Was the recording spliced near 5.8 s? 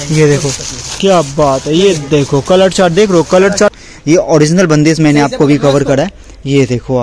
no; 1 cut; at 3.7 s

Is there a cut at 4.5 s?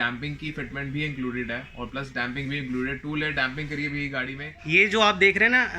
yes; 1 cut; at 4.5 s

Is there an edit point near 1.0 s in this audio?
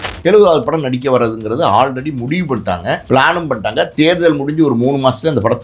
no; 1 cut; at 3.0 s

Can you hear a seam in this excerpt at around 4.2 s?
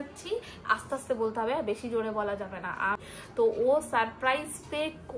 no; 1 cut; at 3.0 s

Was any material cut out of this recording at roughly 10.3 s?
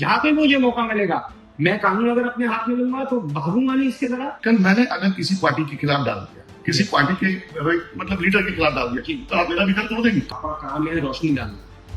yes; 2 cuts; at 4.4 s, 10.3 s

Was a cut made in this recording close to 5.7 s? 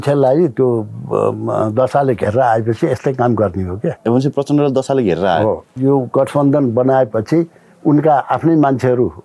yes; 2 cuts; at 4.0 s, 5.7 s

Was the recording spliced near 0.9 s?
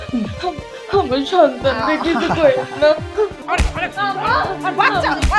no; 1 cut; at 3.4 s

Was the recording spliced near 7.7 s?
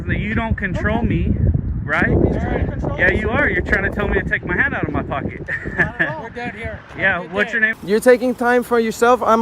yes; 1 cut; at 7.7 s

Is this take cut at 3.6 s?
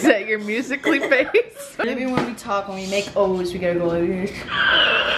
no; 1 cut; at 1.8 s

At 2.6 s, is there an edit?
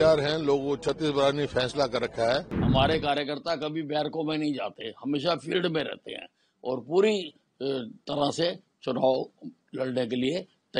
yes; 1 cut; at 2.6 s

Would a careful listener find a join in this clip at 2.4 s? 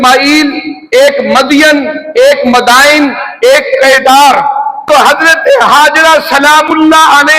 no; 1 cut; at 4.8 s

